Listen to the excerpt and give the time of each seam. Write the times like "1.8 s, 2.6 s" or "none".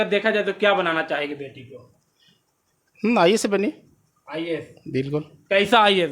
none